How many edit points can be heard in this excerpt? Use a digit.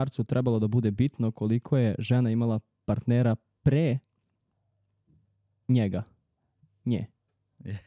0